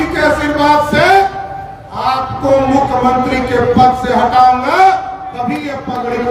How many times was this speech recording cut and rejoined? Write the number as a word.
zero